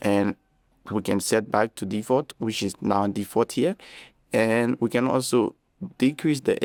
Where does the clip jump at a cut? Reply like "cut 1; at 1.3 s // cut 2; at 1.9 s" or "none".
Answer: none